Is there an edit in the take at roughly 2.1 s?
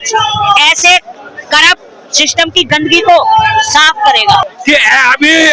no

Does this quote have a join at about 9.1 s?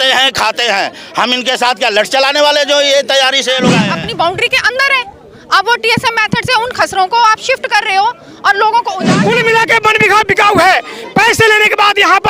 yes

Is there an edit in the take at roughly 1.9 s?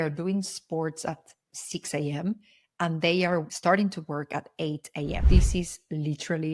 no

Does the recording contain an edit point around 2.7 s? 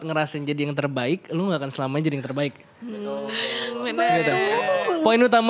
no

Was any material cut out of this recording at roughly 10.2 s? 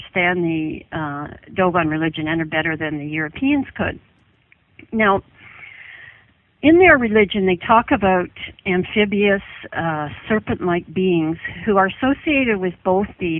yes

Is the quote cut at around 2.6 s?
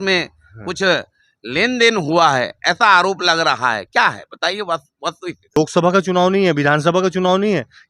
no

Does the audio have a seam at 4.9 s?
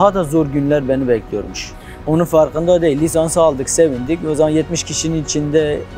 no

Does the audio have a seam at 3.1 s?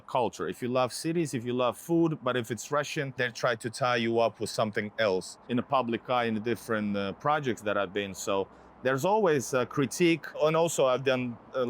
yes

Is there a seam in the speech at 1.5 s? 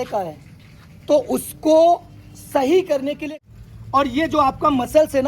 no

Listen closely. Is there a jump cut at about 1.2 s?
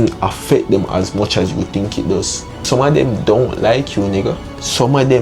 no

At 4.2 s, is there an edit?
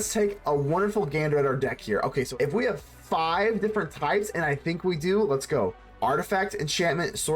no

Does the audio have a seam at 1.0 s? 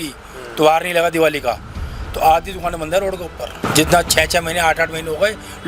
no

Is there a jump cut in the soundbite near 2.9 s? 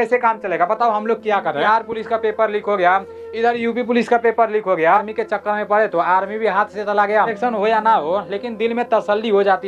no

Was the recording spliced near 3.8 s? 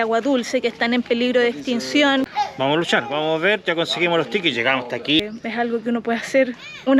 no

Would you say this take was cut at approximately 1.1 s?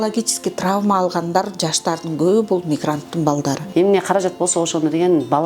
no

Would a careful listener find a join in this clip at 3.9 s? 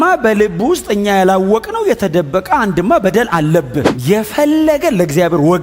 yes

